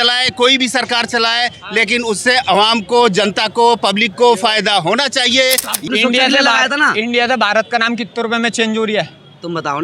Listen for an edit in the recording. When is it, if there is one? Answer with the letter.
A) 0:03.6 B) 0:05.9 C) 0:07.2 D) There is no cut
B